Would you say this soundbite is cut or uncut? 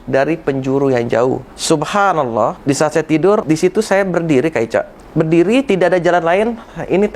cut